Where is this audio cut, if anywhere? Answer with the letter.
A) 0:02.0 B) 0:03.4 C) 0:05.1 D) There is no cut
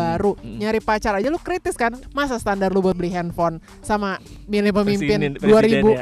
A